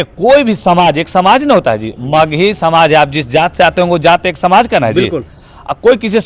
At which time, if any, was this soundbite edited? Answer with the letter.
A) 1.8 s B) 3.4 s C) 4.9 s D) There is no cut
D